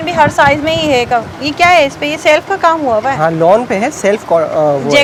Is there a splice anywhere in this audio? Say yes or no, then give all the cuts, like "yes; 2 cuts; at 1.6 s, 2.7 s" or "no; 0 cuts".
no; 0 cuts